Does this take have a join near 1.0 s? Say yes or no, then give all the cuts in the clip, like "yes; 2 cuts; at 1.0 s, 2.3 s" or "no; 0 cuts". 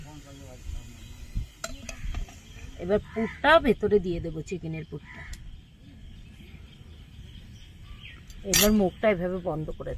no; 2 cuts; at 2.6 s, 8.3 s